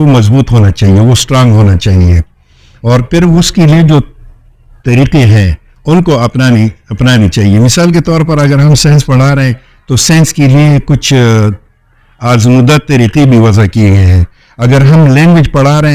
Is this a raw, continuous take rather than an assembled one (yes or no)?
yes